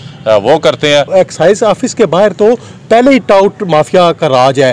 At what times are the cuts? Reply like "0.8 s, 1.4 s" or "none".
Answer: 1.1 s